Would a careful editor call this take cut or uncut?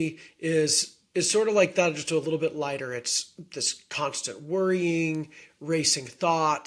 uncut